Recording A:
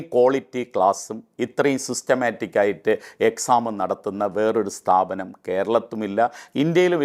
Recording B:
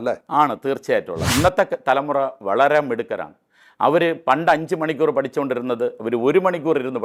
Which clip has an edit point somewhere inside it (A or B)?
B